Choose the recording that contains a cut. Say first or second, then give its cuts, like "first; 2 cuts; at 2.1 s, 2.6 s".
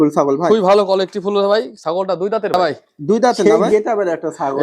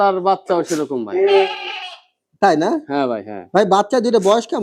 first; 1 cut; at 3.4 s